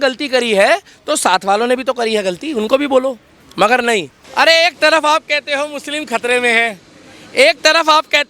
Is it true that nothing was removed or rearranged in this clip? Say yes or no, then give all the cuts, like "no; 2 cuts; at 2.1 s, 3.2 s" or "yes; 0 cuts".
no; 1 cut; at 4.2 s